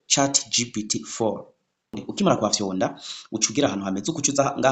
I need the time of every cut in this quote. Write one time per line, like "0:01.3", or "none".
0:02.0